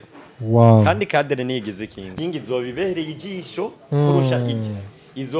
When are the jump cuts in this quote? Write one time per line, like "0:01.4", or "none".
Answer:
0:02.1